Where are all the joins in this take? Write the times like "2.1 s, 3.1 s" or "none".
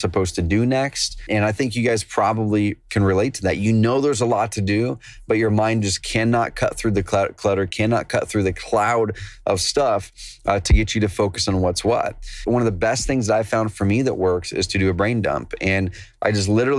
1.2 s, 12.4 s

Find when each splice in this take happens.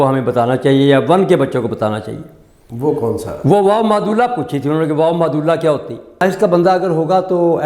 6.2 s

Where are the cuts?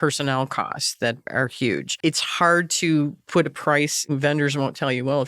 1.4 s, 4.0 s

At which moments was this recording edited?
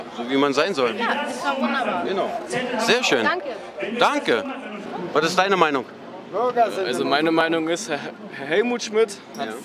none

